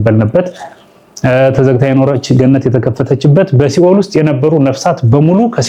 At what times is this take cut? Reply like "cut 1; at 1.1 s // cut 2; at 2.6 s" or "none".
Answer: none